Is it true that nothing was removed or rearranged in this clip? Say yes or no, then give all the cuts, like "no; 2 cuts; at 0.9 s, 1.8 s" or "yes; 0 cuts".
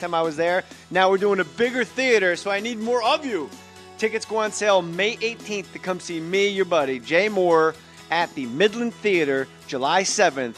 no; 1 cut; at 4.0 s